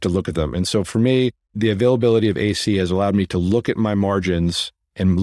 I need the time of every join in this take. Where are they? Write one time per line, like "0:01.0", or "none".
0:01.6